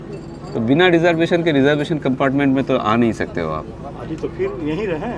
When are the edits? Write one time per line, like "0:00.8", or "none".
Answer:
none